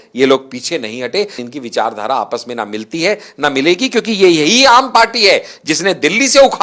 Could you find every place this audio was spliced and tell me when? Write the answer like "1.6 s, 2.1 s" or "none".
1.4 s